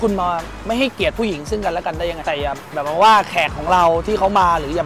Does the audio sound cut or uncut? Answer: cut